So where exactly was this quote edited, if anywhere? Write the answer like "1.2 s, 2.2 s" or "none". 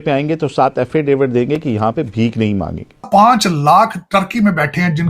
3.1 s